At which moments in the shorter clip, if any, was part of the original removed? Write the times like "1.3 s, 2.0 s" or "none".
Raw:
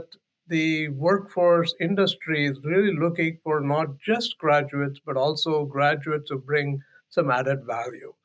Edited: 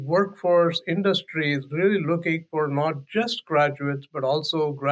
none